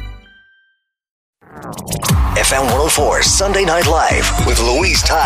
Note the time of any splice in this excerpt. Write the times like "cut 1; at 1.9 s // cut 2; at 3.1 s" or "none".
cut 1; at 1.3 s